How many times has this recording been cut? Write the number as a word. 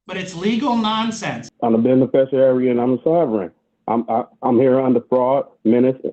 one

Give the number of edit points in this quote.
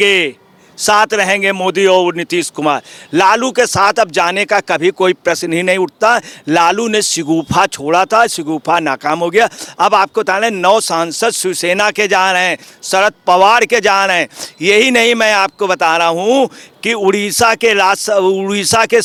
zero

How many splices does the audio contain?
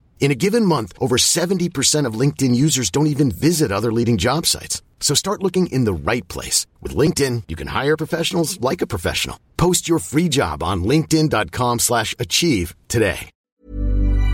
one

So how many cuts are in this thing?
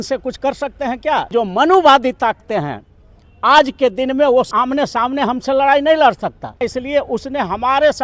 three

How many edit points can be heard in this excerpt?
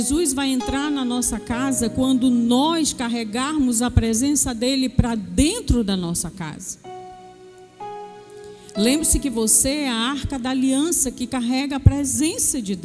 zero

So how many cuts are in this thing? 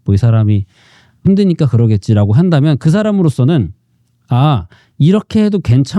one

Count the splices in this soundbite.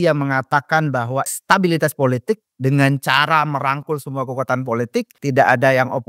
two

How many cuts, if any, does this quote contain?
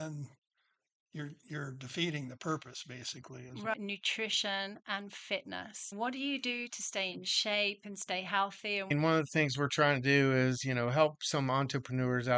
three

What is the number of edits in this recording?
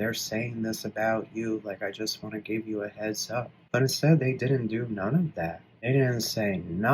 two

